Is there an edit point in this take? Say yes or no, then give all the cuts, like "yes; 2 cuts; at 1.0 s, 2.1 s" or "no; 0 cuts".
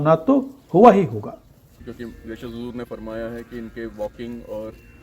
yes; 1 cut; at 1.7 s